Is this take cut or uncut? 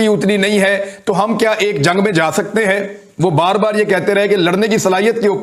uncut